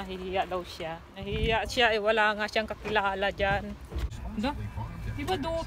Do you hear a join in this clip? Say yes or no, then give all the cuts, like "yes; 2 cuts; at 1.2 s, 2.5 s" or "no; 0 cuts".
yes; 2 cuts; at 1.1 s, 4.2 s